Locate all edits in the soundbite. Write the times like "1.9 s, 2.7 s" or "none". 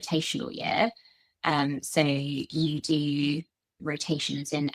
3.8 s

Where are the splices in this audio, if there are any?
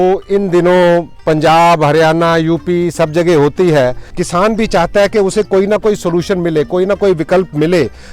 4.1 s

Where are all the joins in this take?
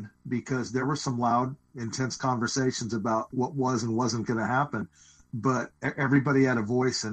0.8 s, 1.7 s, 3.3 s, 5.8 s

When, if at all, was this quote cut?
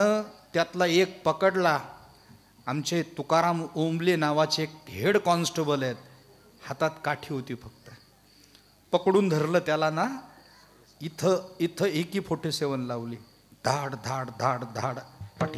none

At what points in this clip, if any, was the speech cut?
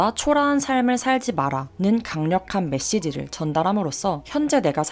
none

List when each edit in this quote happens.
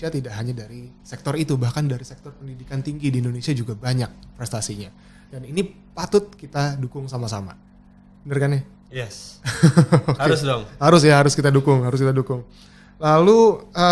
none

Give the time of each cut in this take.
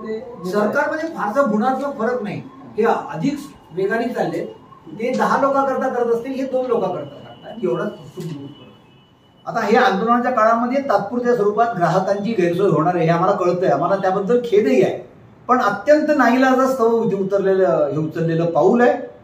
9.3 s

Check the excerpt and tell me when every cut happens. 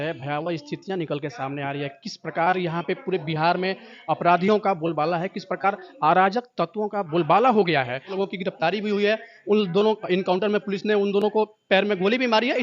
8.1 s

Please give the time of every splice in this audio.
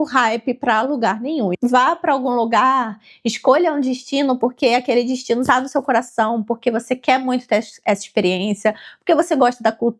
1.5 s

